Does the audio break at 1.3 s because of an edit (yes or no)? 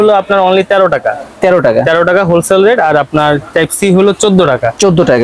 no